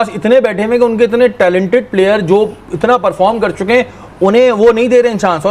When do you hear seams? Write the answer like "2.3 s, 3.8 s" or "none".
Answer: none